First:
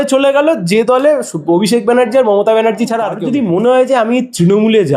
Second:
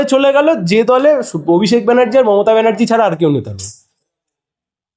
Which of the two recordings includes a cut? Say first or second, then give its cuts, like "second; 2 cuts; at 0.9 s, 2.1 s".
first; 1 cut; at 3.2 s